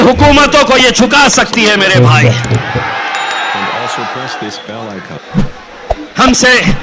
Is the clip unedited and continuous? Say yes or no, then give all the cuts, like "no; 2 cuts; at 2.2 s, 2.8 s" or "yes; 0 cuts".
yes; 0 cuts